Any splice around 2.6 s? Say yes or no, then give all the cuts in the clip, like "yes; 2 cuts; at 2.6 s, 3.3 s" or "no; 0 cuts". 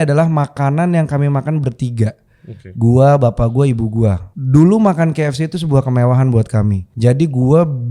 no; 2 cuts; at 4.3 s, 6.9 s